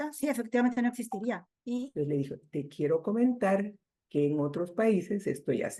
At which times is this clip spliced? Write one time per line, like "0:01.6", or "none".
0:01.5